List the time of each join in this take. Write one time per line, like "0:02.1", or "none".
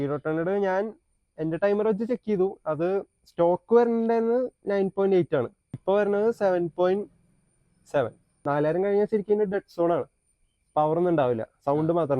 0:05.6
0:08.3